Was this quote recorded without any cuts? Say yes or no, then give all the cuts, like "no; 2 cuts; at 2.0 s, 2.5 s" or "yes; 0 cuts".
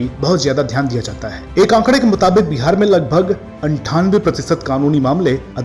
yes; 0 cuts